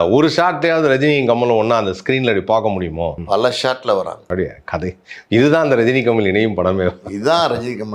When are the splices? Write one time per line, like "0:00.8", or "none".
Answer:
0:03.2
0:04.2

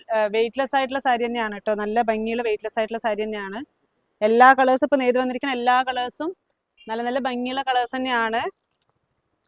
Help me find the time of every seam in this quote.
none

